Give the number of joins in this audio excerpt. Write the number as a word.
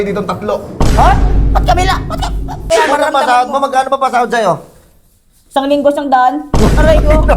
one